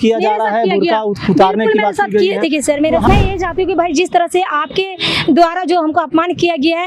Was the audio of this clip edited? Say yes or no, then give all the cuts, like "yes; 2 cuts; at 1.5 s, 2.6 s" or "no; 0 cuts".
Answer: yes; 1 cut; at 3.1 s